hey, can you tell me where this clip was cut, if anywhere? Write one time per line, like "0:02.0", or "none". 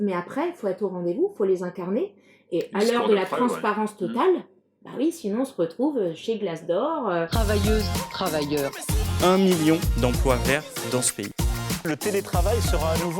0:07.3